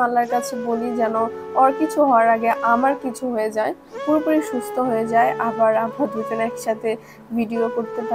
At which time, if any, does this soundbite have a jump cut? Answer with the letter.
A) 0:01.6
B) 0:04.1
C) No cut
B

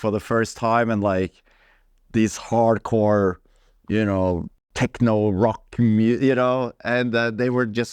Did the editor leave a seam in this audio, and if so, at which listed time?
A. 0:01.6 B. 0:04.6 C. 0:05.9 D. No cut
B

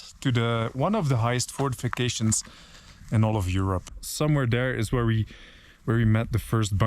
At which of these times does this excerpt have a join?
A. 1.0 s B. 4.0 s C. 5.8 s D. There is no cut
B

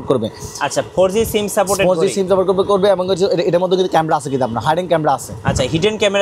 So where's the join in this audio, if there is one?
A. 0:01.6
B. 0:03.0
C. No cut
C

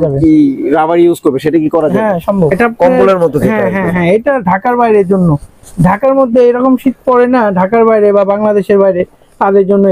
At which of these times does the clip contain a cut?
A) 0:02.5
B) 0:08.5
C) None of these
A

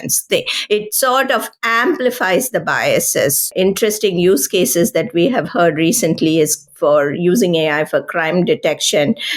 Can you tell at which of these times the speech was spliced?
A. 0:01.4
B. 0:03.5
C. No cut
B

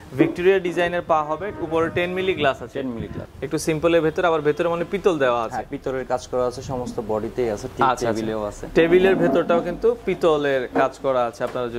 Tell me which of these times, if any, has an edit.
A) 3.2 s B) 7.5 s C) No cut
A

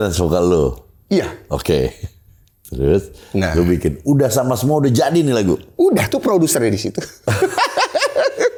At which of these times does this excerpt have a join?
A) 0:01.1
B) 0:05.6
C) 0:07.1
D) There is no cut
D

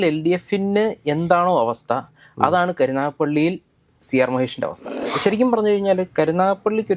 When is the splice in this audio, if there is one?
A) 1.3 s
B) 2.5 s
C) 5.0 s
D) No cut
C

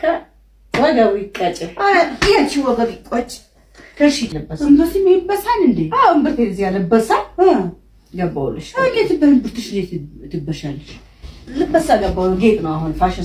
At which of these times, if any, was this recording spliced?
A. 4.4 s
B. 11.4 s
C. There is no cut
A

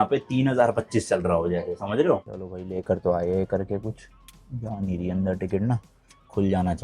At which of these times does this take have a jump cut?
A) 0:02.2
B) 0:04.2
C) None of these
A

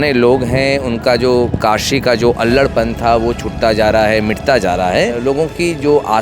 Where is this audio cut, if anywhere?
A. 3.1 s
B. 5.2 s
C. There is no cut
B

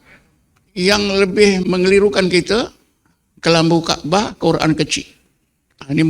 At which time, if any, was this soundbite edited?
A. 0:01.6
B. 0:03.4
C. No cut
A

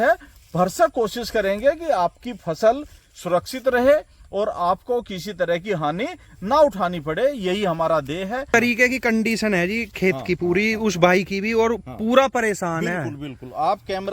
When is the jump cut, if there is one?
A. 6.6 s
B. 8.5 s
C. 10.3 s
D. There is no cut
B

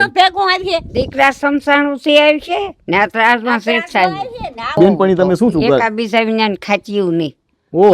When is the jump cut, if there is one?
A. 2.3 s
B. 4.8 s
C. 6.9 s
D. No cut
B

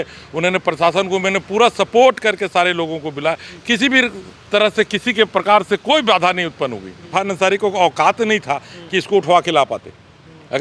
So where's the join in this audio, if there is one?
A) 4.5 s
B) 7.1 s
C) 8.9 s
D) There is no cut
B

